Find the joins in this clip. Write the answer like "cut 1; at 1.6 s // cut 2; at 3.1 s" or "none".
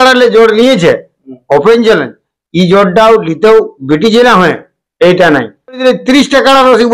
cut 1; at 5.8 s